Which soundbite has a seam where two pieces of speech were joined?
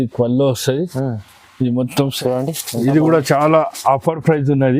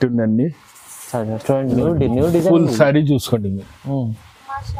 first; 1 cut; at 2.2 s

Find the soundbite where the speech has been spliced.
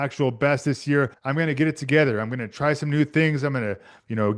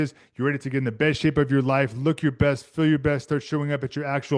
first; 1 cut; at 1.2 s

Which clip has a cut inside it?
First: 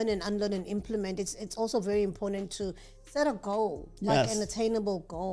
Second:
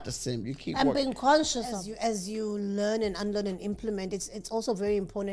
second; 1 cut; at 1.7 s

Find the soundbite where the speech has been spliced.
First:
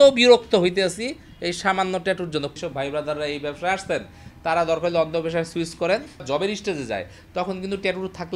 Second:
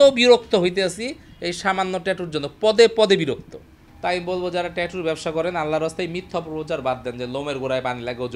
first; 2 cuts; at 2.5 s, 6.2 s

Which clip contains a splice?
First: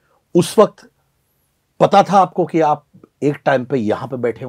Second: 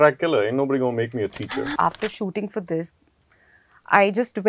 second; 1 cut; at 1.8 s

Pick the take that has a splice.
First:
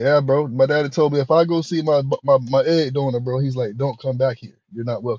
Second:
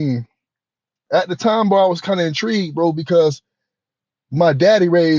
second; 1 cut; at 1.0 s

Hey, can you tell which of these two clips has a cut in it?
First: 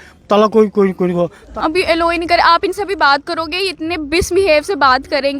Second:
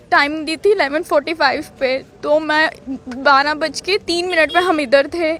first; 1 cut; at 1.4 s

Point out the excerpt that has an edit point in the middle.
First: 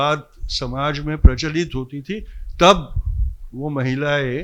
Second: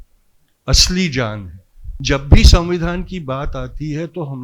second; 1 cut; at 1.9 s

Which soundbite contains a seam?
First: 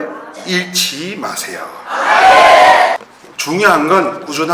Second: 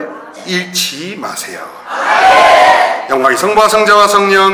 first; 1 cut; at 3.0 s

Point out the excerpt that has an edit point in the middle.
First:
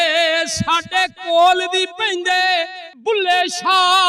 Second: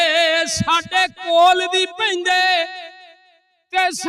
first; 1 cut; at 3.0 s

